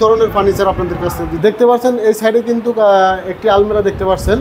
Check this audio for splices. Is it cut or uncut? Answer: cut